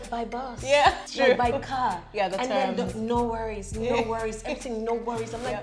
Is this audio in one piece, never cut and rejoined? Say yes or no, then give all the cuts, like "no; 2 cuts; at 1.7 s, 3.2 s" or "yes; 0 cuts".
no; 1 cut; at 1.0 s